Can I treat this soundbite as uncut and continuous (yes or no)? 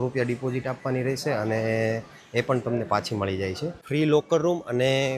no